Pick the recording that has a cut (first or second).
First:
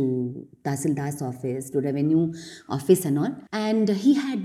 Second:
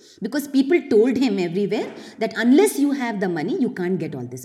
first